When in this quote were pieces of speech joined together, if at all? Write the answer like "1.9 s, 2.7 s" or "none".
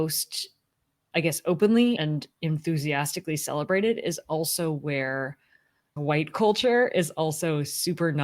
5.9 s